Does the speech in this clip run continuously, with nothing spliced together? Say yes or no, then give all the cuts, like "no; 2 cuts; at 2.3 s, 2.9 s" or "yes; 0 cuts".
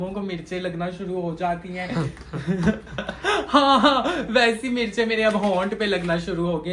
yes; 0 cuts